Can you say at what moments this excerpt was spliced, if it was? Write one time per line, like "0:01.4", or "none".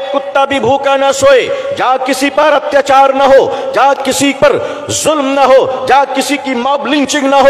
none

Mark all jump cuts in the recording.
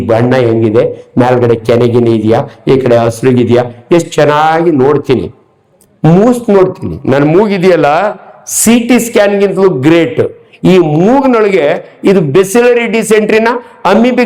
none

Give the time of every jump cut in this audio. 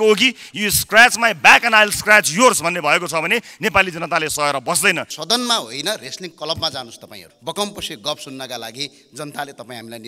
0:05.1
0:07.3

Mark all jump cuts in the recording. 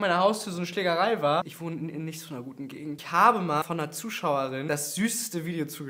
0:03.0
0:03.6
0:04.6

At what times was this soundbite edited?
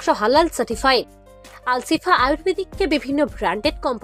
none

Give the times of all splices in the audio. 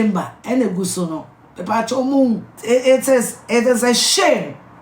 0:02.5

